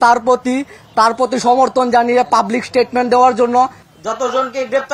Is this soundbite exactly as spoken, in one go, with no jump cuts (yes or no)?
no